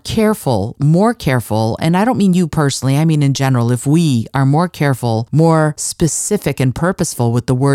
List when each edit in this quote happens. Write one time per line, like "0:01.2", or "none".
0:05.2
0:05.8